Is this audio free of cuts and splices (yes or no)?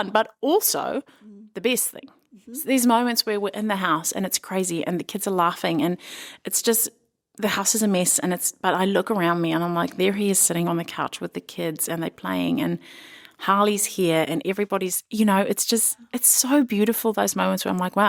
yes